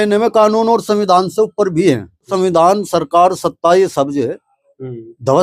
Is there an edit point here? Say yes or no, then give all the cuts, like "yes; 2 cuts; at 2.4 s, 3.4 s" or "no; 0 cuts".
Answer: yes; 1 cut; at 2.3 s